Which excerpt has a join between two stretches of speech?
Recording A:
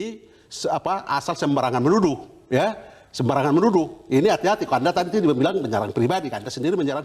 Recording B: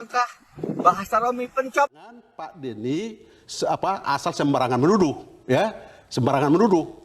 B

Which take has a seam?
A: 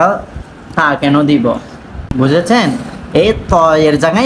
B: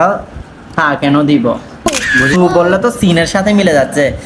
B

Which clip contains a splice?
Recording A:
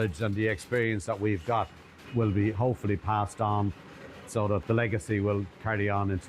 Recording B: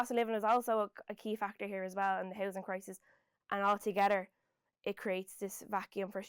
A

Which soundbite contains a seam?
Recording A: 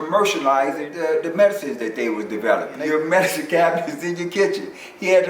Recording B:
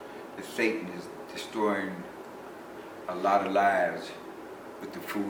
A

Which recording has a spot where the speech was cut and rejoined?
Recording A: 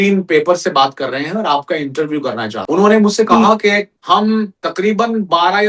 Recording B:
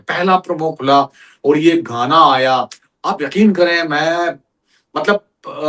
A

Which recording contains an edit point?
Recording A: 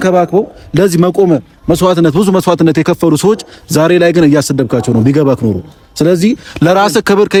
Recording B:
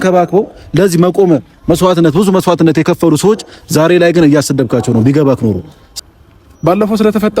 B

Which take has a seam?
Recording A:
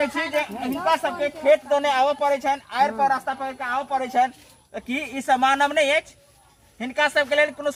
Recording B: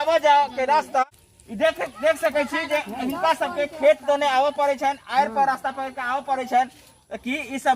B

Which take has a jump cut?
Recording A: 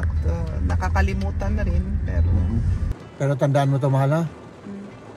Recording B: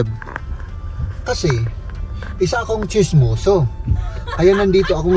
A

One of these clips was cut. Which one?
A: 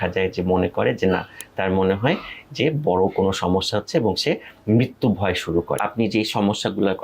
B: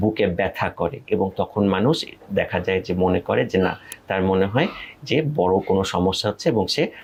A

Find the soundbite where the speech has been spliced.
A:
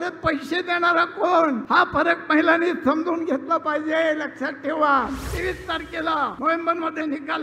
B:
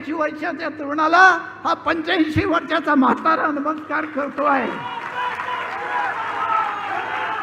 A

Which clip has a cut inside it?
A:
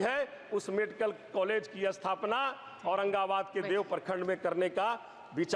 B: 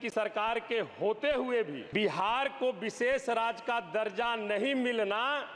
B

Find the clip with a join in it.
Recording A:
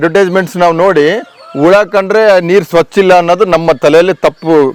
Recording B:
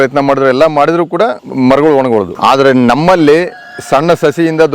B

